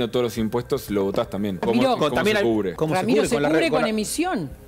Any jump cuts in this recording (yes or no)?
yes